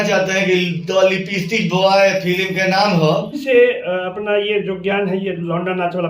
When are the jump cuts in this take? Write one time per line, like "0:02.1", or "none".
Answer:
0:03.4